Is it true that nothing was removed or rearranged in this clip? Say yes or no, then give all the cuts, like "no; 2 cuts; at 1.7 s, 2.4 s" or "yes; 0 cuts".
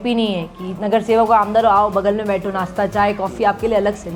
yes; 0 cuts